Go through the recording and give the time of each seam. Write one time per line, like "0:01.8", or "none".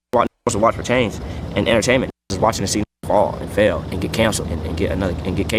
none